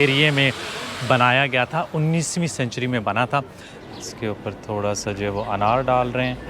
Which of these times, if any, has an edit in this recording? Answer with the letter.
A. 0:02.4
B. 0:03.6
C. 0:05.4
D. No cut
B